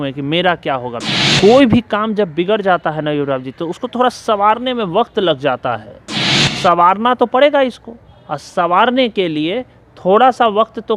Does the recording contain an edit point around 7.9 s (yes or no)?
no